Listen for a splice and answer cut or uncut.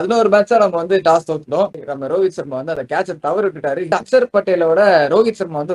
cut